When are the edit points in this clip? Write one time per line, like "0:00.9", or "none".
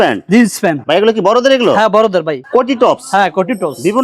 0:02.4